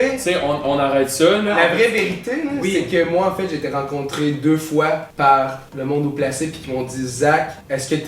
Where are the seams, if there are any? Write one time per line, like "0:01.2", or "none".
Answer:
0:01.5